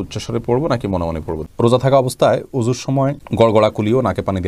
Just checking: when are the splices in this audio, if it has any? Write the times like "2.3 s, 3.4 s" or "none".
1.4 s